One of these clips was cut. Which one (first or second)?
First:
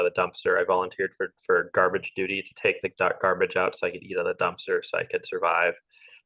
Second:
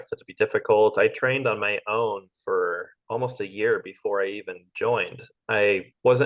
second